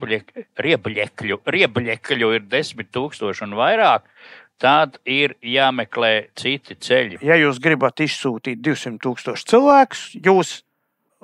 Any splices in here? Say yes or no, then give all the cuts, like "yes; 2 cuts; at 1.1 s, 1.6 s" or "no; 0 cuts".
yes; 1 cut; at 7.1 s